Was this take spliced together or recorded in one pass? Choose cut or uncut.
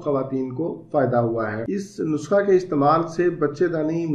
cut